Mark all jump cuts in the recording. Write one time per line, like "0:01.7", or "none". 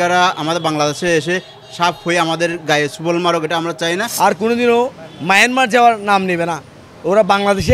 0:04.1